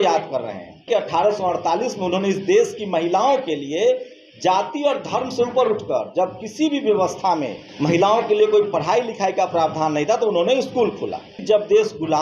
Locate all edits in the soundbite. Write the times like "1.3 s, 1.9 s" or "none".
0.9 s, 7.6 s, 11.4 s